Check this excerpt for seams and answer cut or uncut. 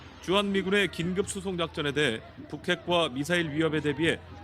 cut